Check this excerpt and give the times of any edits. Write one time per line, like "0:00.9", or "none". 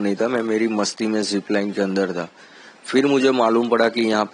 none